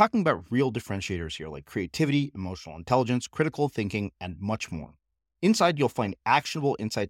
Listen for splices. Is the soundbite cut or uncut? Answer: uncut